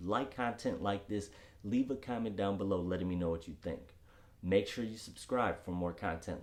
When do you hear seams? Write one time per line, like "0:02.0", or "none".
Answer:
none